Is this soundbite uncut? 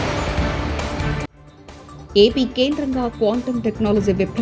yes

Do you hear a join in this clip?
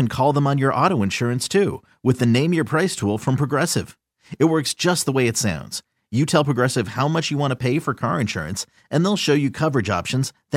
no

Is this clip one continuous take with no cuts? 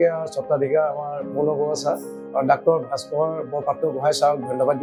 yes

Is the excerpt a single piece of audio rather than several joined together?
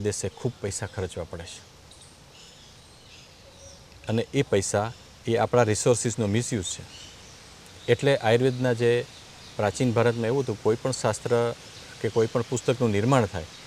yes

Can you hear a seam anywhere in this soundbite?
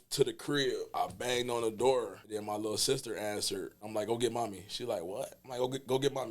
yes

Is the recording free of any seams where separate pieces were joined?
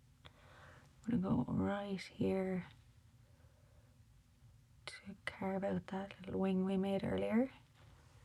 yes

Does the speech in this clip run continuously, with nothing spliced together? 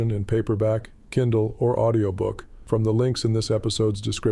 no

